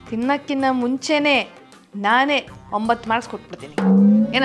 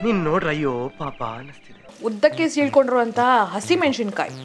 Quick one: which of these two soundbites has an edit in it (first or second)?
second